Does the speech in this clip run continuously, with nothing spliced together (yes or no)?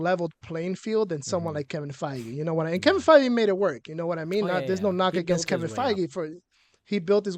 yes